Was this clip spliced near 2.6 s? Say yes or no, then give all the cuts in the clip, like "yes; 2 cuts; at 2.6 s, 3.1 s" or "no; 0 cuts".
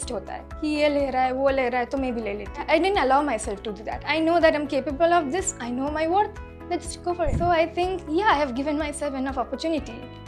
yes; 3 cuts; at 2.6 s, 4.0 s, 7.3 s